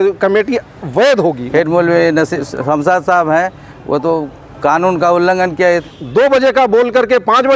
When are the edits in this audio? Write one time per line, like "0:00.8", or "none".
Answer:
0:01.4
0:05.8